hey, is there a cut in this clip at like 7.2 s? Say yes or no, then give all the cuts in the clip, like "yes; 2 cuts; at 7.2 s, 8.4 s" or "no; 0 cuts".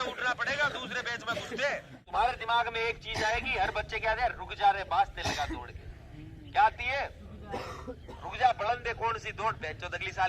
no; 1 cut; at 1.9 s